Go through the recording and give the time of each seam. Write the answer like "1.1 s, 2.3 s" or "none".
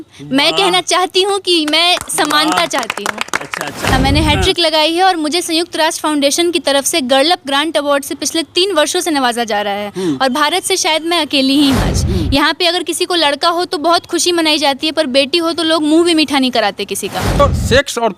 3.9 s, 11.9 s, 17.4 s